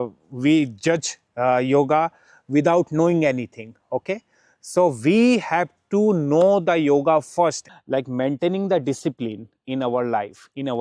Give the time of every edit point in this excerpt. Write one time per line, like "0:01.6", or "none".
0:07.7